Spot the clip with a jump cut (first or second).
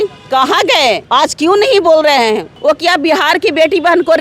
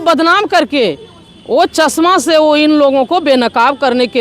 first